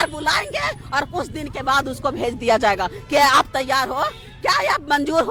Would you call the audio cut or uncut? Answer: uncut